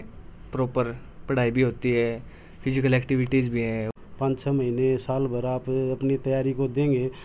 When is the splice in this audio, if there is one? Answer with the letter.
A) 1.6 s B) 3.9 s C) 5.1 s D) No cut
B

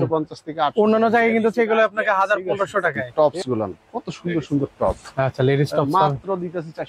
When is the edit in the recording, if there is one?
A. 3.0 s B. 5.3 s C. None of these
A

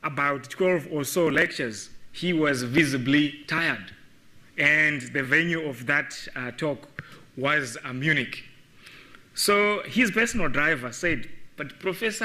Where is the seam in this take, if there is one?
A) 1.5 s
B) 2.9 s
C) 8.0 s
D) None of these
A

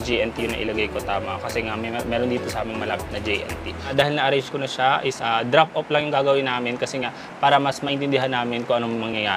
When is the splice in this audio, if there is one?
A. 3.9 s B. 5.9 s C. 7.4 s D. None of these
A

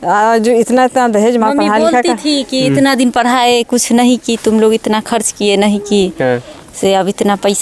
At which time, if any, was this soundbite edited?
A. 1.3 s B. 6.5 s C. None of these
C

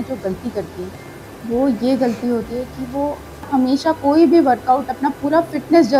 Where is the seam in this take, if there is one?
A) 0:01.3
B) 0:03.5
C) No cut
B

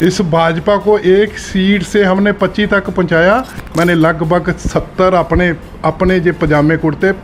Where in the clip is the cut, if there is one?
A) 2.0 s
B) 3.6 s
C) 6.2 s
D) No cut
B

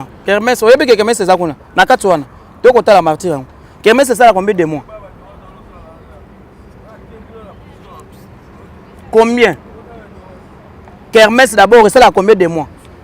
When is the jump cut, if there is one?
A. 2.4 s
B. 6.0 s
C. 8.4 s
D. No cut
D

